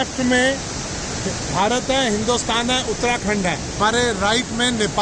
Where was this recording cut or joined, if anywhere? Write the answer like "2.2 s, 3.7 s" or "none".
3.8 s